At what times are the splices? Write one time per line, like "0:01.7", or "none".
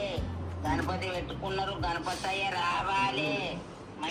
none